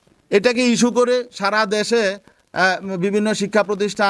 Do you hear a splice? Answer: no; 0 cuts

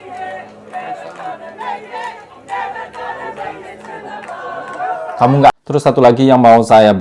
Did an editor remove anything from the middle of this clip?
yes; 1 cut; at 5.5 s

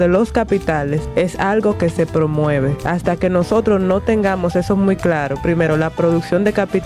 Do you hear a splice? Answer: yes; 2 cuts; at 1.0 s, 2.8 s

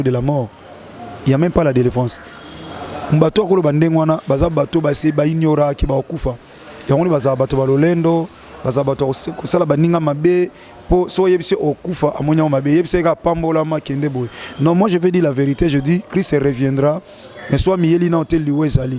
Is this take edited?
no; 0 cuts

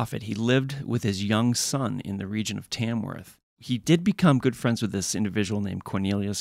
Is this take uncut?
no; 1 cut; at 3.6 s

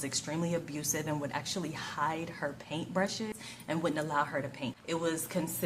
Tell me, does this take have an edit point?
yes; 2 cuts; at 3.3 s, 4.8 s

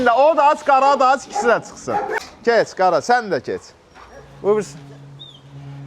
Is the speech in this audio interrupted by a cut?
yes; 1 cut; at 2.2 s

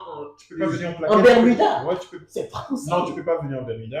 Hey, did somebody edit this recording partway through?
yes; 1 cut; at 2.1 s

